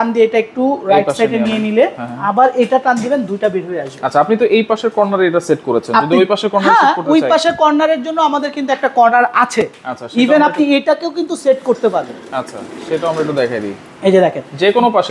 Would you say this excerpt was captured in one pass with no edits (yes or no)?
yes